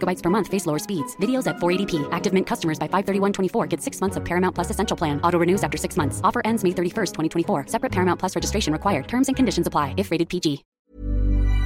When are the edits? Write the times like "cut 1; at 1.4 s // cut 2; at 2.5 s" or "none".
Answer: cut 1; at 10.7 s